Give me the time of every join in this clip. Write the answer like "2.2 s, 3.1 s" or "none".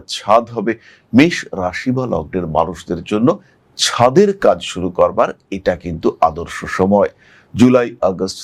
none